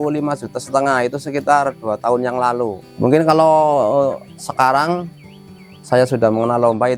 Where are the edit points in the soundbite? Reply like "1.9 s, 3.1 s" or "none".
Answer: none